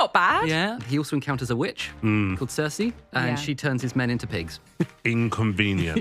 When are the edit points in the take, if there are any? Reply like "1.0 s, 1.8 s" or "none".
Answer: 0.8 s, 1.8 s, 3.0 s, 4.7 s

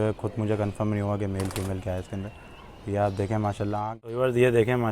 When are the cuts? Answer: 3.8 s

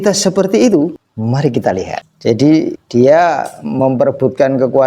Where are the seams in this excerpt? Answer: 1.1 s, 2.1 s, 2.8 s

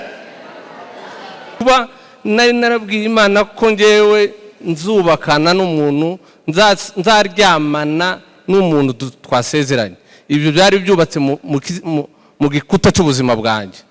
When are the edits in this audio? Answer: 1.6 s

